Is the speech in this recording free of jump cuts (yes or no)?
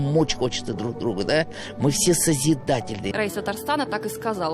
no